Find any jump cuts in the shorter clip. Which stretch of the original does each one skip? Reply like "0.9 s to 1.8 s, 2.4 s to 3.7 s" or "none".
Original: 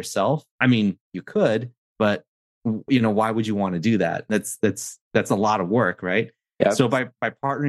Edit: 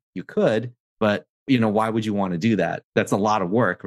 2.4 s to 2.8 s, 4.2 s to 5.0 s